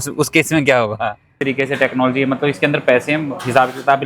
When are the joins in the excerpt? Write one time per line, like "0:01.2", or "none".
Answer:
0:01.3